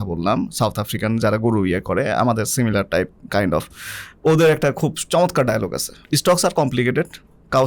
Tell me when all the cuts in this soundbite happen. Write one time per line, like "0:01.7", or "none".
0:05.9